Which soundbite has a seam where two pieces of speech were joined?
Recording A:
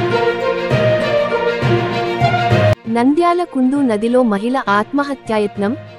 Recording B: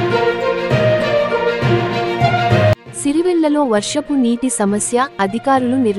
B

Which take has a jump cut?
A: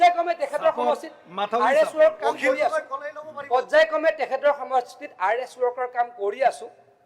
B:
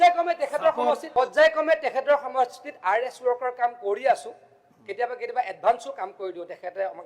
B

